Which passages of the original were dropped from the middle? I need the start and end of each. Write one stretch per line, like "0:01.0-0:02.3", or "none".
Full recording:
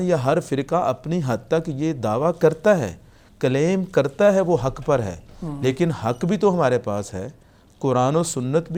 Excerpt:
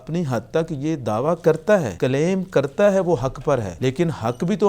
0:02.9-0:03.3
0:05.1-0:05.5